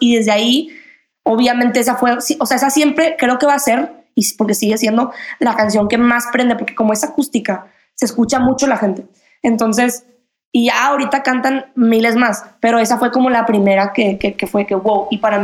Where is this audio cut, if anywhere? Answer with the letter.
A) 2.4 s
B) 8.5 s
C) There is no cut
C